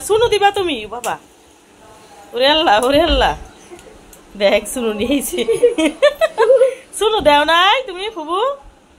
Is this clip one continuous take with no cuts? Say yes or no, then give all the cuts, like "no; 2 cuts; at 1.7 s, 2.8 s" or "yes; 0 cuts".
yes; 0 cuts